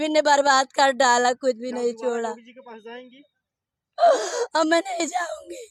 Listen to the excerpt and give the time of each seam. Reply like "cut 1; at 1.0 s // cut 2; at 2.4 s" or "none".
none